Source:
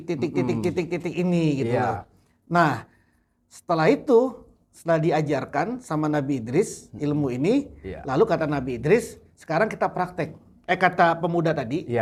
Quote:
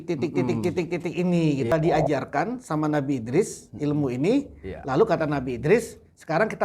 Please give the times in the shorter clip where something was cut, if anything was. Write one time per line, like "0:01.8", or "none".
0:01.7